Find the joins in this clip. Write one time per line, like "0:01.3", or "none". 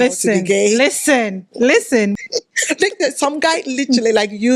0:02.2